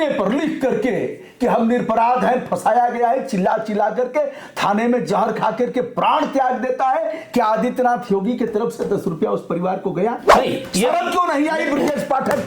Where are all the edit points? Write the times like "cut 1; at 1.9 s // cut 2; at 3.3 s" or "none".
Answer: cut 1; at 10.3 s